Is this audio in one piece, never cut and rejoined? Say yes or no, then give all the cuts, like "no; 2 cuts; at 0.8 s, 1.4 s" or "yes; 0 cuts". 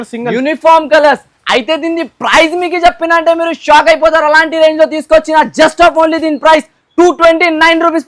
yes; 0 cuts